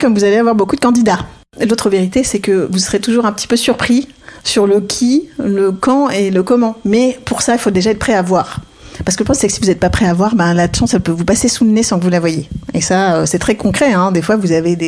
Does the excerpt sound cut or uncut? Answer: cut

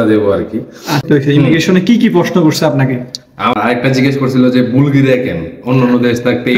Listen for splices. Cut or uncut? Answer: cut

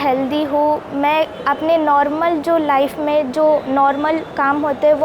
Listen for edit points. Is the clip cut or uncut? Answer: uncut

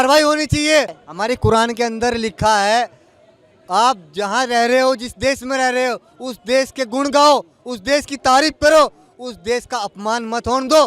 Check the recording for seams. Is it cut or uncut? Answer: uncut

